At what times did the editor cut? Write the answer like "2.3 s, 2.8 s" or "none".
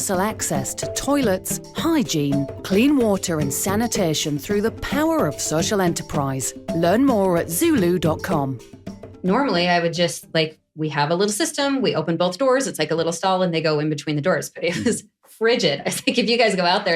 9.0 s